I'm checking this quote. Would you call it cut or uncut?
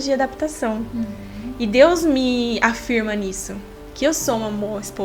uncut